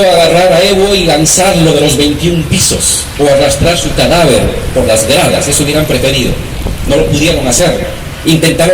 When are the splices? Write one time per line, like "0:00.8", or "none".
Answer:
none